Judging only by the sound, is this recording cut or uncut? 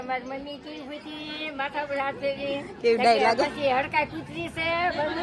uncut